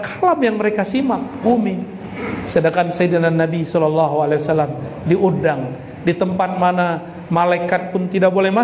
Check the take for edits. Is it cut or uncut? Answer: cut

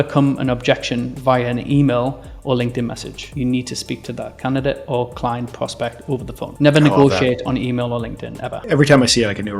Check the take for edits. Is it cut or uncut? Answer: uncut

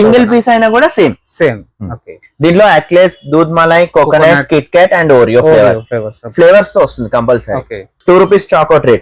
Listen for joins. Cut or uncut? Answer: uncut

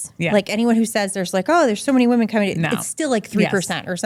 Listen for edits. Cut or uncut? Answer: uncut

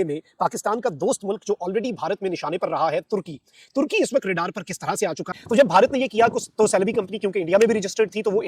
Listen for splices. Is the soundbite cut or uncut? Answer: cut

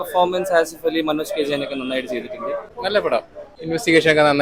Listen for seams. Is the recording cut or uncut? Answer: cut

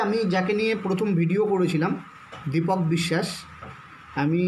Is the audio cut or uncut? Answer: uncut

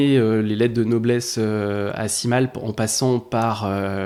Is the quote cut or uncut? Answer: uncut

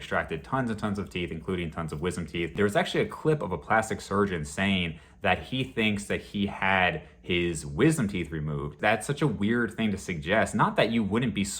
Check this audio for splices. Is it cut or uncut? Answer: cut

